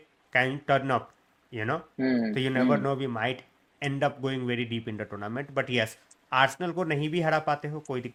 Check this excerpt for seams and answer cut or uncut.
uncut